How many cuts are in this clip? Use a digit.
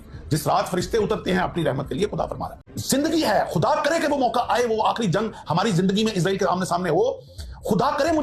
1